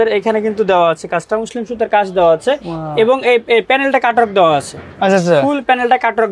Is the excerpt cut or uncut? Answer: uncut